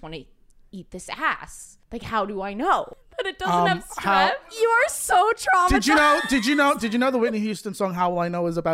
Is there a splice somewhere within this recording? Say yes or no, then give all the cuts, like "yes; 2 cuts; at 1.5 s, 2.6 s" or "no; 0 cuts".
yes; 2 cuts; at 3.0 s, 4.5 s